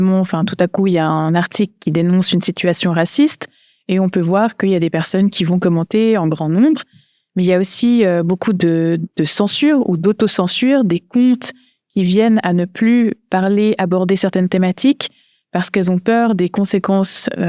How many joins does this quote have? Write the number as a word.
zero